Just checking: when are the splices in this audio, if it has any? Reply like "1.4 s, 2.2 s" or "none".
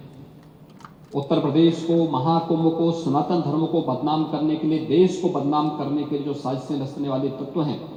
none